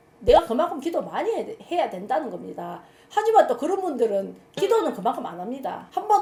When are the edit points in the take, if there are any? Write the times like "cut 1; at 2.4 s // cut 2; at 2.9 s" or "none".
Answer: none